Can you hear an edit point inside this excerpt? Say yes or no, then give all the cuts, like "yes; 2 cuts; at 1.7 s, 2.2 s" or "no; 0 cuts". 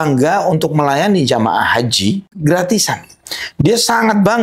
yes; 1 cut; at 2.3 s